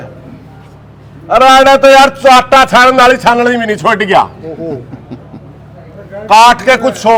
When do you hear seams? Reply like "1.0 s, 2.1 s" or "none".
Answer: none